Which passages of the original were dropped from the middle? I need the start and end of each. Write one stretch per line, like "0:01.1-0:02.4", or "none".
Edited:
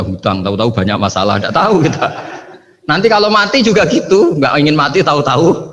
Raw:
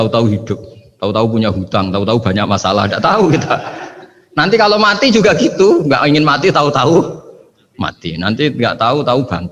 none